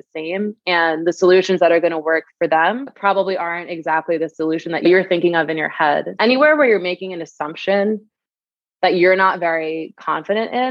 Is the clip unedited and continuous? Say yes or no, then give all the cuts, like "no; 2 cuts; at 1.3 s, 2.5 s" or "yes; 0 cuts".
no; 2 cuts; at 4.9 s, 6.1 s